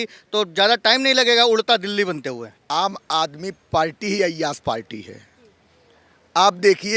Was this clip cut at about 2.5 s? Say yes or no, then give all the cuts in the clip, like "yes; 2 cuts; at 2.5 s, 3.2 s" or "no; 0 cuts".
yes; 1 cut; at 2.5 s